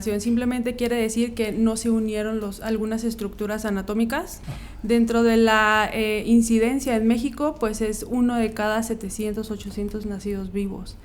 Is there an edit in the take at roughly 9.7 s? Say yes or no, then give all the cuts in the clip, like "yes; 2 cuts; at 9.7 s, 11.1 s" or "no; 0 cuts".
no; 1 cut; at 4.4 s